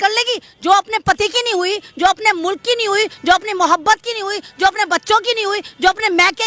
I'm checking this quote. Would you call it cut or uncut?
uncut